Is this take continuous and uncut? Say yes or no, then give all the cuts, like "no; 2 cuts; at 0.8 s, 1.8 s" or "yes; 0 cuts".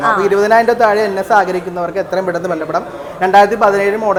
yes; 0 cuts